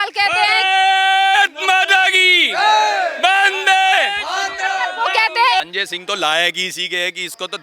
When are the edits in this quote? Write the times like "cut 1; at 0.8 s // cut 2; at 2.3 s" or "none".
cut 1; at 5.7 s